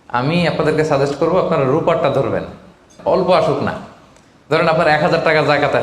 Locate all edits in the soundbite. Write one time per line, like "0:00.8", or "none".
0:02.9

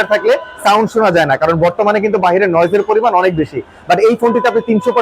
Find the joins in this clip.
none

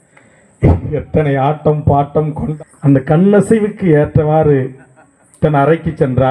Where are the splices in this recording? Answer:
0:02.5

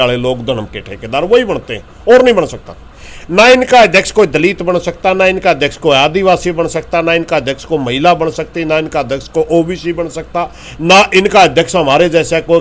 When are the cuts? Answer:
none

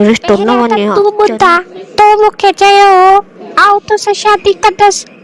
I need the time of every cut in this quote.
0:00.9

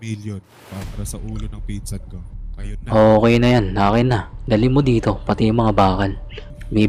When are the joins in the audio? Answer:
none

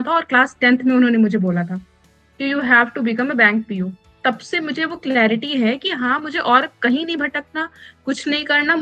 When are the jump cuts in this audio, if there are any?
none

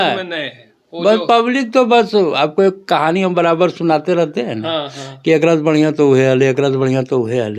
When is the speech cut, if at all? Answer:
none

